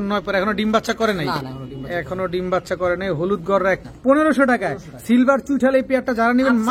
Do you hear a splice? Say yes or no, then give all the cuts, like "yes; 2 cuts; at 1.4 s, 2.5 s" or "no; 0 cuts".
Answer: yes; 1 cut; at 3.8 s